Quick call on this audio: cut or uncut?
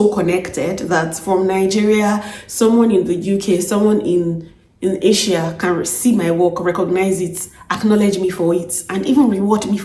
uncut